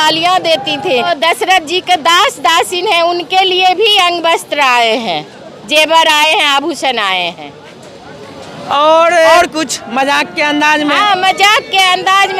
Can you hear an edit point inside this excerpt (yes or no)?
yes